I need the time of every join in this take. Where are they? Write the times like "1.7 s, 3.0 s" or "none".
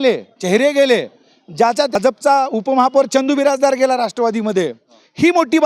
2.0 s

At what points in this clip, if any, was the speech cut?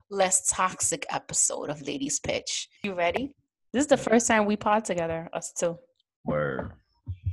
2.6 s

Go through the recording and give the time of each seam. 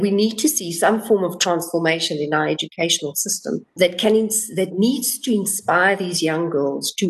3.7 s

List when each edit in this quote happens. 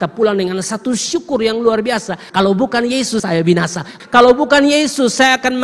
2.2 s, 3.6 s

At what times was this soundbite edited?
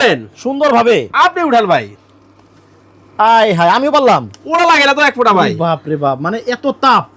none

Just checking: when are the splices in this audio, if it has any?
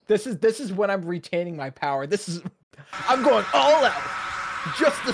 none

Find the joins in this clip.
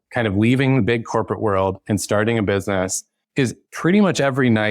3.1 s

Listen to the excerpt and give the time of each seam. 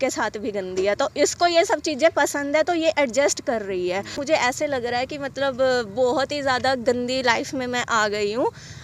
4.2 s

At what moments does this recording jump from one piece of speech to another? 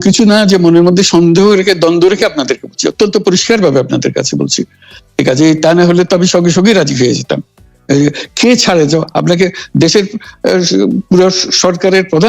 none

